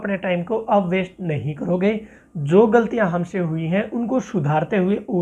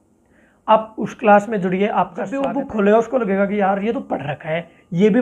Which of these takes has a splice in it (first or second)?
second